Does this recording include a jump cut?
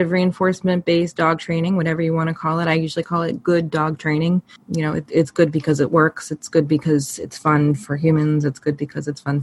yes; 1 cut; at 4.5 s

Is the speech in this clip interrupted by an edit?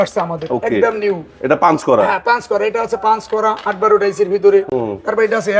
no; 0 cuts

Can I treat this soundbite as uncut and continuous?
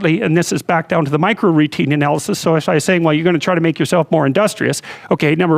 yes; 0 cuts

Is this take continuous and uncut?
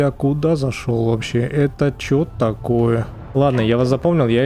no; 1 cut; at 3.4 s

